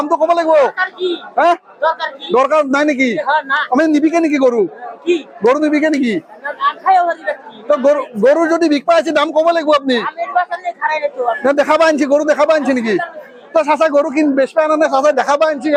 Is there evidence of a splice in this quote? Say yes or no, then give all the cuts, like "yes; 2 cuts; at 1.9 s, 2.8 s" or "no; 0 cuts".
no; 0 cuts